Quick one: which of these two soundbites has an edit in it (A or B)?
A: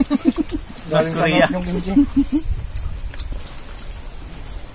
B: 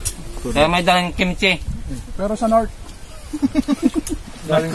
A